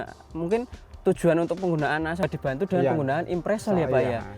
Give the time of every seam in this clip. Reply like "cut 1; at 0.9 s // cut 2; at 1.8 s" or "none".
cut 1; at 2.2 s

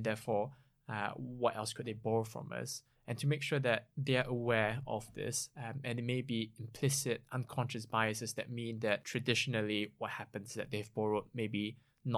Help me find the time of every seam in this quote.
cut 1; at 9.1 s

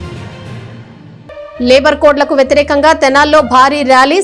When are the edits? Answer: cut 1; at 1.0 s

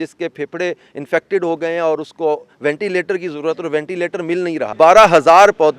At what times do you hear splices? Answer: cut 1; at 4.7 s

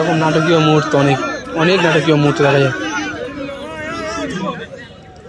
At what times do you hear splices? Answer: cut 1; at 4.4 s

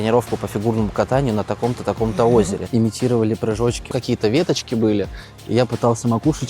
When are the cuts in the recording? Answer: cut 1; at 2.6 s // cut 2; at 3.9 s

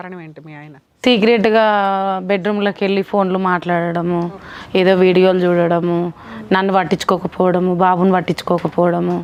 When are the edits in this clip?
none

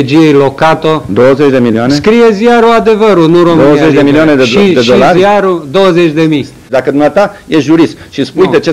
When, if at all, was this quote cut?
cut 1; at 6.6 s

